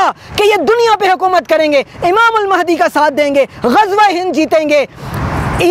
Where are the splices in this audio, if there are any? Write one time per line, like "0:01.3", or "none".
none